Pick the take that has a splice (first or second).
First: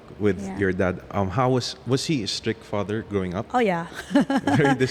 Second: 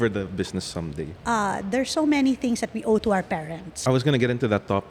second